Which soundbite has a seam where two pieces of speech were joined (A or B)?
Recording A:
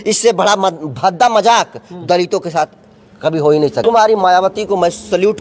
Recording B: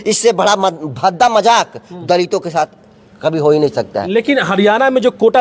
A